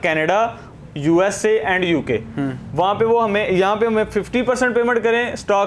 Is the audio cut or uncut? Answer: uncut